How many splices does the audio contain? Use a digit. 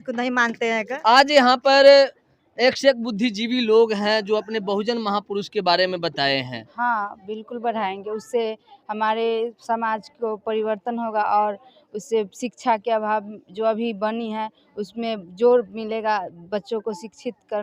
2